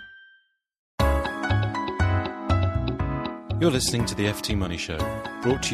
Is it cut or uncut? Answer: cut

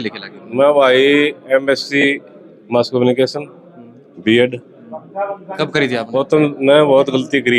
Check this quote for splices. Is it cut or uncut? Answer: cut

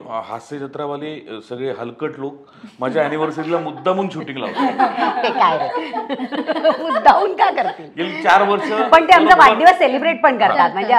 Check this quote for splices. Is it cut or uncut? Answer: uncut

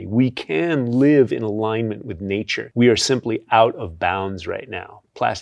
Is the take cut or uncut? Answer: cut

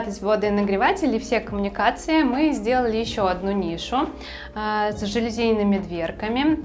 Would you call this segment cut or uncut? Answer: uncut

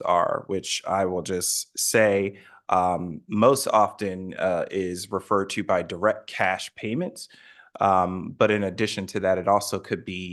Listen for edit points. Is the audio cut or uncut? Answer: uncut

